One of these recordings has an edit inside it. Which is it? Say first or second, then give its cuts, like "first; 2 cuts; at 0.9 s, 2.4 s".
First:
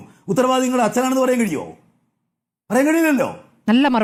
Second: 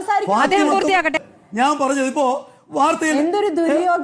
second; 1 cut; at 1.2 s